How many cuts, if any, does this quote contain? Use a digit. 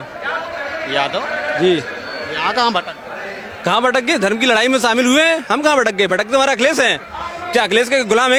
0